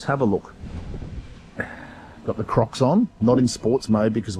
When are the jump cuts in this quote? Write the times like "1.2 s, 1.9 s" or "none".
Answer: 1.4 s, 3.1 s